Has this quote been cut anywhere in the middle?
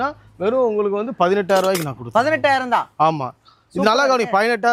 no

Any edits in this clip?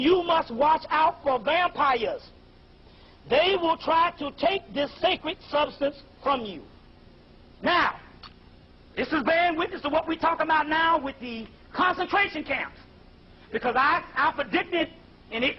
yes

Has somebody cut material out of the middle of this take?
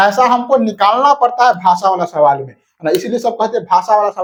no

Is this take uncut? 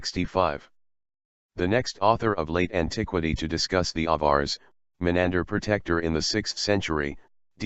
yes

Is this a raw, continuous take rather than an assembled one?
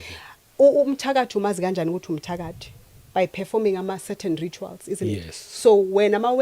yes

